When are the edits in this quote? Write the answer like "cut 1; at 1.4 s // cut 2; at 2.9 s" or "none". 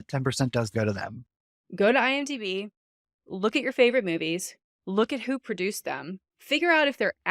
cut 1; at 1.1 s

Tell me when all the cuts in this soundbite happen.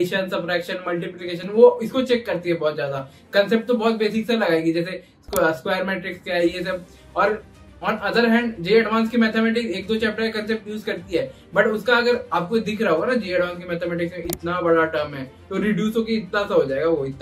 none

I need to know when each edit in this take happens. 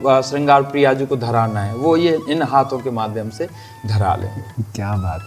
none

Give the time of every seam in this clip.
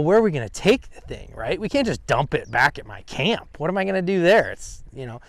none

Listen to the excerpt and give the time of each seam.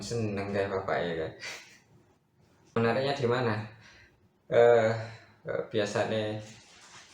cut 1; at 2.7 s

